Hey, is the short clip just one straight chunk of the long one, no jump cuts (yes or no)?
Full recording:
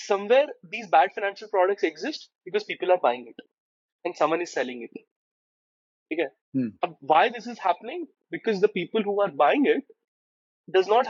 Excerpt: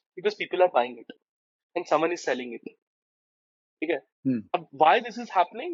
yes